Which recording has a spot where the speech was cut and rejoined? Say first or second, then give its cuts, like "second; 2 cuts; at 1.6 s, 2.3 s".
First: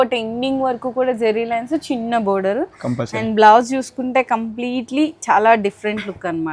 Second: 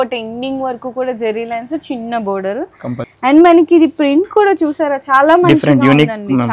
second; 1 cut; at 3.0 s